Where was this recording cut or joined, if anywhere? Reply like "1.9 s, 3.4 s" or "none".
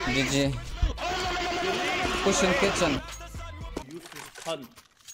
3.8 s